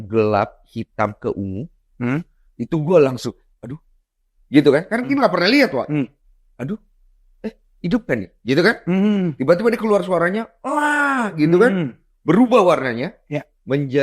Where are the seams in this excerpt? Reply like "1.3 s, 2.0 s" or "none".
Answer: none